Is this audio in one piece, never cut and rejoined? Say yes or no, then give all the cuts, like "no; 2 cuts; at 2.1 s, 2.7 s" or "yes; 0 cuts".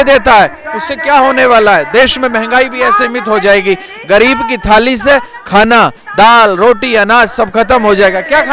yes; 0 cuts